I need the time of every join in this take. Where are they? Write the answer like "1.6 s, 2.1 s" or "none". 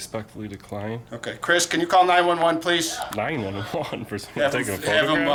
none